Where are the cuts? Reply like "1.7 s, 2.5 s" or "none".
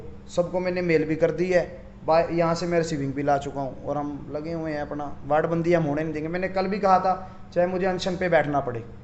none